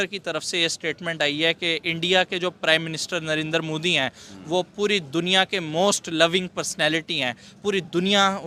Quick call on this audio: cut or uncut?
uncut